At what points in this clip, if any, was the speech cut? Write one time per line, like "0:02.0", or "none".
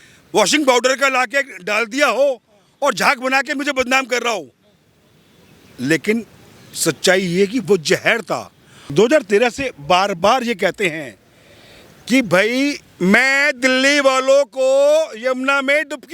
0:08.7